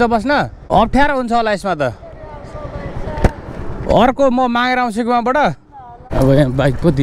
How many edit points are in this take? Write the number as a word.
two